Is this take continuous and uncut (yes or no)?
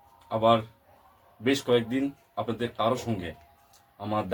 yes